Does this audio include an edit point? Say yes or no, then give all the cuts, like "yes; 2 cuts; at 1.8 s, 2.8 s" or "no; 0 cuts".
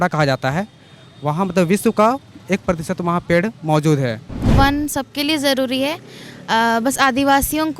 yes; 1 cut; at 4.5 s